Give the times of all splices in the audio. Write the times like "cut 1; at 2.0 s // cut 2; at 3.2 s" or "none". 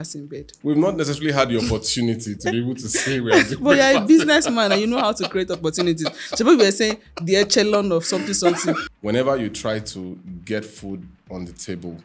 cut 1; at 8.8 s

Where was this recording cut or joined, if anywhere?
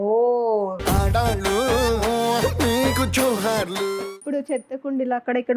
cut 1; at 4.0 s

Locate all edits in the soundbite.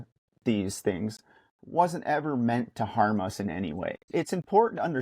cut 1; at 4.0 s

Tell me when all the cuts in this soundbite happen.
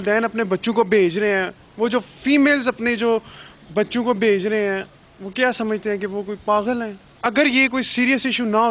cut 1; at 7.0 s

